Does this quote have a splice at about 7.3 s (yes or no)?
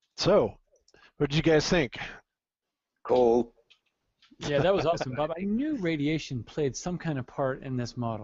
yes